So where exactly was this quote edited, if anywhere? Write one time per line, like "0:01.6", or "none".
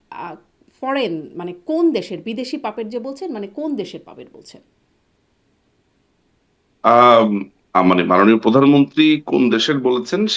none